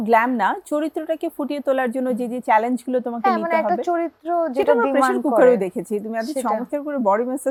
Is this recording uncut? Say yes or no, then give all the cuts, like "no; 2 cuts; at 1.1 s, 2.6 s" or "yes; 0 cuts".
yes; 0 cuts